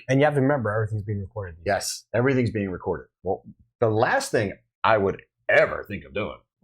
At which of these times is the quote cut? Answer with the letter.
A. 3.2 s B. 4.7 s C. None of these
A